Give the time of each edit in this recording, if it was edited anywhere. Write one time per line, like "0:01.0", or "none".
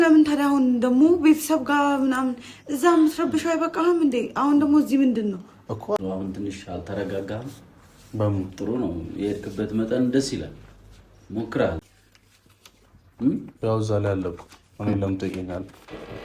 0:06.0
0:11.8